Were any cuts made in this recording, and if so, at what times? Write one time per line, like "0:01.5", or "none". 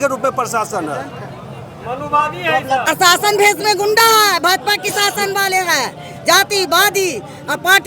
0:02.9